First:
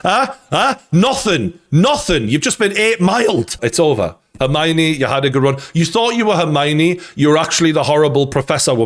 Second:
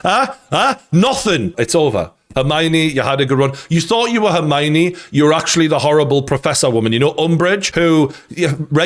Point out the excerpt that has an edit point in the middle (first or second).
second